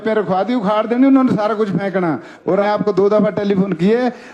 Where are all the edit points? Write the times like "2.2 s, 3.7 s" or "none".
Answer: 2.6 s